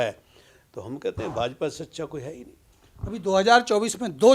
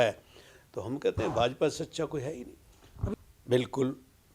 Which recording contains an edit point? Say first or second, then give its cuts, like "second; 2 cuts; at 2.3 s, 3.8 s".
second; 1 cut; at 3.1 s